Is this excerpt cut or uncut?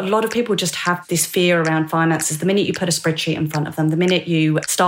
cut